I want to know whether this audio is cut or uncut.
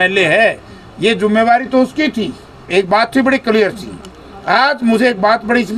cut